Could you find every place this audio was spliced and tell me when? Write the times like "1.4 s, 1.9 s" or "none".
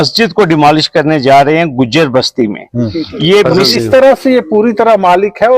3.6 s